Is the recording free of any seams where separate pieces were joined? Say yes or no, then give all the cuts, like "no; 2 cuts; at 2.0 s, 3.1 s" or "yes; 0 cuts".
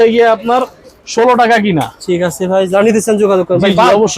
yes; 0 cuts